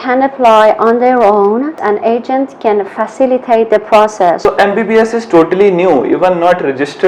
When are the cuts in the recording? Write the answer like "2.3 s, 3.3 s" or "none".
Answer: 1.8 s, 4.4 s

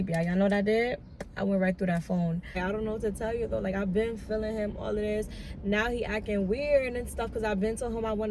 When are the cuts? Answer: 2.6 s

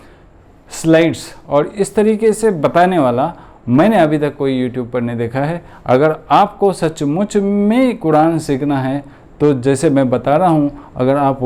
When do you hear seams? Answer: none

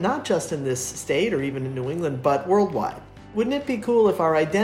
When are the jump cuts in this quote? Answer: 3.3 s

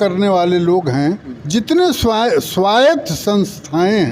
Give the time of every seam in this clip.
1.3 s

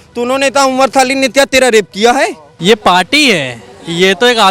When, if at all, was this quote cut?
2.5 s

